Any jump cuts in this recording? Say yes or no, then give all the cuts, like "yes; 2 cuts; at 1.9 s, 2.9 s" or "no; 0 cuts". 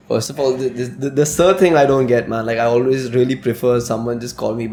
no; 0 cuts